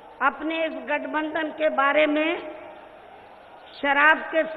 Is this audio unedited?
yes; 0 cuts

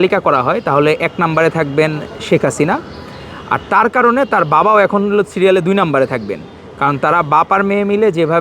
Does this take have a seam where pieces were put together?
no; 0 cuts

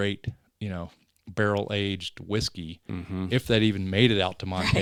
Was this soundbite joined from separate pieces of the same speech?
no; 0 cuts

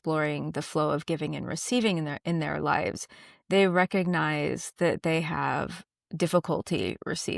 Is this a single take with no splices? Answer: yes; 0 cuts

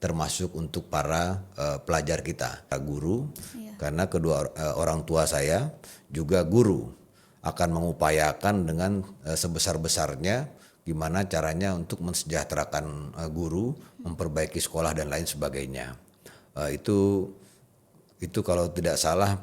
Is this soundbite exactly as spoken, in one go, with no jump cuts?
no; 1 cut; at 2.7 s

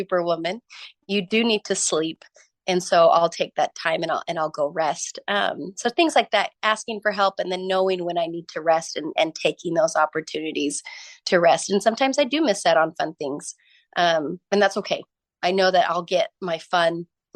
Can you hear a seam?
no; 0 cuts

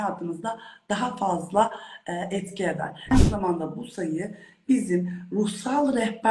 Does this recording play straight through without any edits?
no; 1 cut; at 3.1 s

